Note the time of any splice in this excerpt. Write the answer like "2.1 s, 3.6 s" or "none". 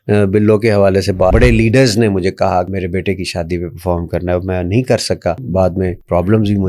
1.3 s, 2.7 s, 5.7 s